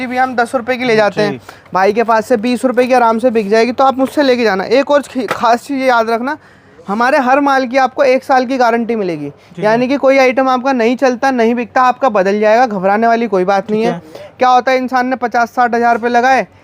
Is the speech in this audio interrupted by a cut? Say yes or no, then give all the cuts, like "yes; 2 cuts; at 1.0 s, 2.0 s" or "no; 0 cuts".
no; 0 cuts